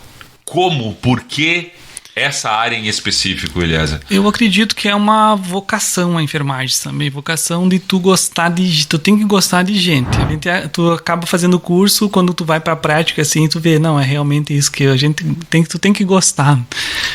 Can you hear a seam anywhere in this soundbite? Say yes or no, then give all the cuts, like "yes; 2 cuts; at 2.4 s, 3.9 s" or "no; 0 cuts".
yes; 1 cut; at 10.3 s